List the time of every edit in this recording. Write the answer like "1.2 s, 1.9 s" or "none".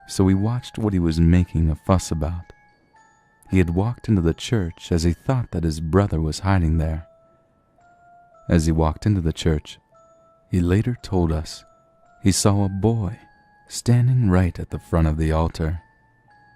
7.9 s